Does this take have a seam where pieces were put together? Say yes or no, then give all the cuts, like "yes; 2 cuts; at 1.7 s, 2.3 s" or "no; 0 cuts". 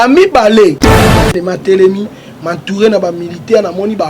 yes; 1 cut; at 1.1 s